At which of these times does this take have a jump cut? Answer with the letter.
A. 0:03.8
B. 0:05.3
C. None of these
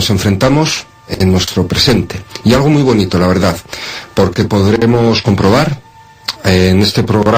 C